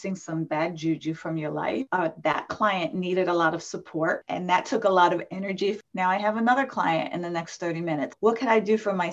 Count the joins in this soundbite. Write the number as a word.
three